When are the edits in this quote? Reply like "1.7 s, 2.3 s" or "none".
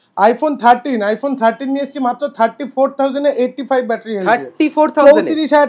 none